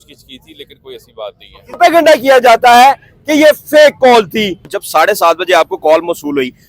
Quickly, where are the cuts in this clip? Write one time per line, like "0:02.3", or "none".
0:01.8
0:04.8